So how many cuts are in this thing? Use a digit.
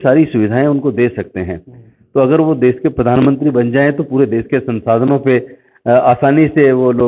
0